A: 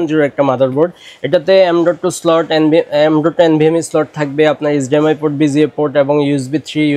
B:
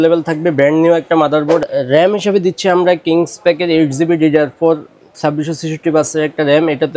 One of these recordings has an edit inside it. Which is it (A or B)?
B